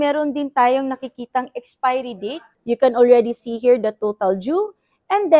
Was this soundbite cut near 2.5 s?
yes; 1 cut; at 2.5 s

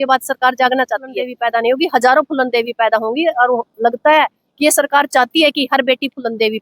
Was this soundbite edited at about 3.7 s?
no; 1 cut; at 1.3 s

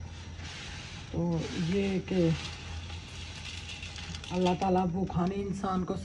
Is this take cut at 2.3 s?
no; 0 cuts

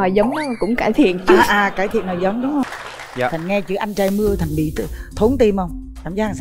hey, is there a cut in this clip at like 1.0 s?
no; 1 cut; at 2.6 s

